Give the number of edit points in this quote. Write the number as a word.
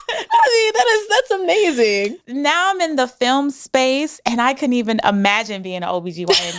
one